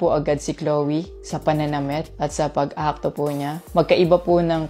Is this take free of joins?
yes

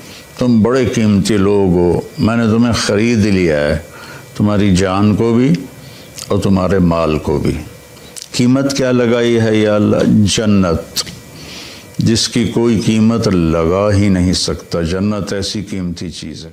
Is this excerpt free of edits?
yes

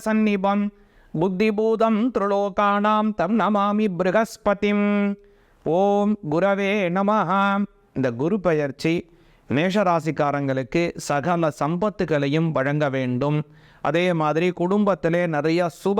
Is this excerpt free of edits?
yes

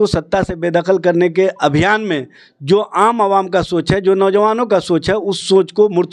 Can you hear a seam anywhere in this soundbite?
no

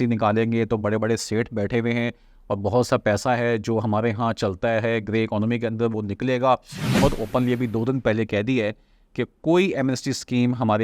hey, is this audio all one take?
no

